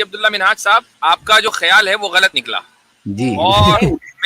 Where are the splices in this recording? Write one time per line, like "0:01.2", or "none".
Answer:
0:00.9